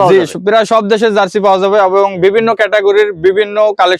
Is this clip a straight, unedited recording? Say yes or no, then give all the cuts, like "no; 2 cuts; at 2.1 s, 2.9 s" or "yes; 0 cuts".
yes; 0 cuts